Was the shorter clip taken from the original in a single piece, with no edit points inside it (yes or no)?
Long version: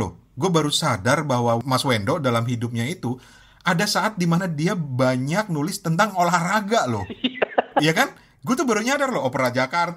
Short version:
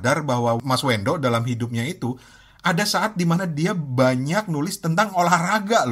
yes